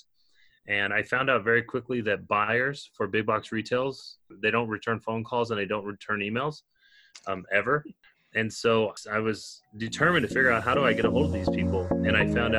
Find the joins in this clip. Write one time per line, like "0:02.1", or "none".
none